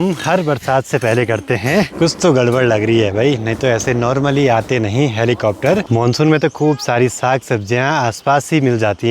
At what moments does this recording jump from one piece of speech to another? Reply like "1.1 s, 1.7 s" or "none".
1.9 s, 5.9 s